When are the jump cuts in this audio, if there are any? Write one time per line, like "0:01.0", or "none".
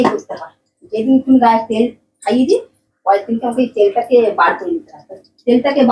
none